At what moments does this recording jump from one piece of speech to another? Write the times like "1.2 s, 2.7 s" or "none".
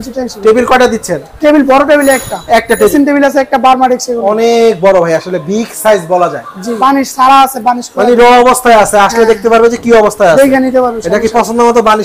2.9 s, 6.8 s